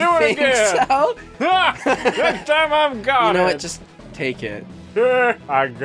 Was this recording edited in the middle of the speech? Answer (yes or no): no